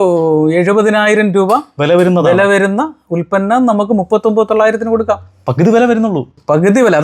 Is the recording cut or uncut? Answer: uncut